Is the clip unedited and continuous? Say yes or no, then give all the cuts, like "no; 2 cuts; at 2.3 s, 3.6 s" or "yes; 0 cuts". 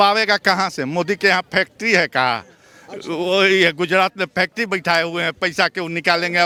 yes; 0 cuts